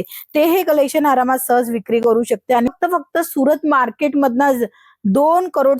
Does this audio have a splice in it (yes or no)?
yes